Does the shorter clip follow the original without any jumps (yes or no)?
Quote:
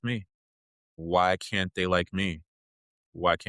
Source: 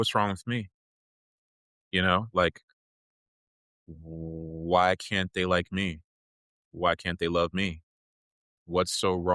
no